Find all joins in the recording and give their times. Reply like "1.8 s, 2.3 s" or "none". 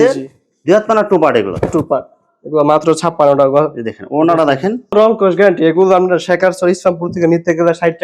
4.9 s